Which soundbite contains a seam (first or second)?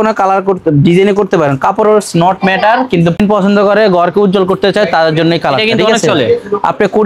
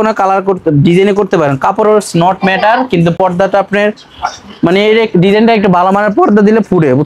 first